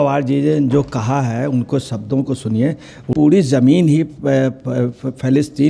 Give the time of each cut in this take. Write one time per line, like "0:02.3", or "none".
0:03.1

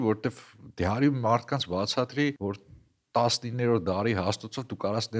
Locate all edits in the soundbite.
0:02.4

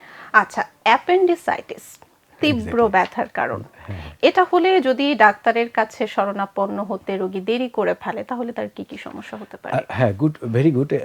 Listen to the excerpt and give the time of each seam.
none

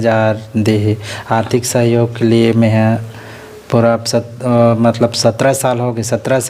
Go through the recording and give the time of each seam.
none

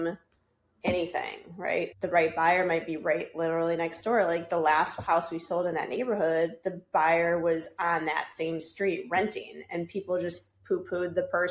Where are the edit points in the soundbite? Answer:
0:02.0

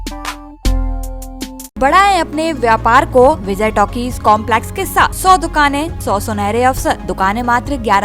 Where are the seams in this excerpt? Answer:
0:01.8
0:03.5
0:05.2
0:05.9
0:07.1

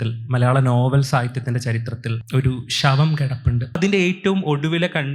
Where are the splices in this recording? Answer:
0:03.8

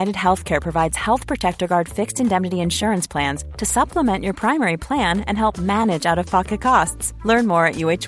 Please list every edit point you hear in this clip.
none

